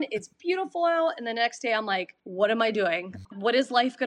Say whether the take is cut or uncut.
cut